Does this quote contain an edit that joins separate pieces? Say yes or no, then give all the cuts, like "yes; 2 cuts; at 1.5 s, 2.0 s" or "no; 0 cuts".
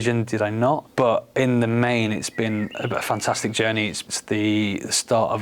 yes; 2 cuts; at 0.9 s, 4.0 s